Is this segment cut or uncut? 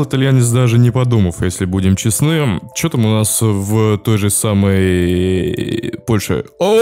uncut